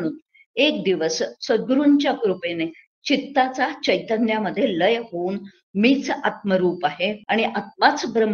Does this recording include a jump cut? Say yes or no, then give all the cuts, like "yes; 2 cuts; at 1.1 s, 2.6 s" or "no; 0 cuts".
yes; 1 cut; at 7.2 s